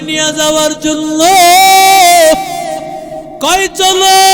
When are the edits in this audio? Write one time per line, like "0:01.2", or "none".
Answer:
none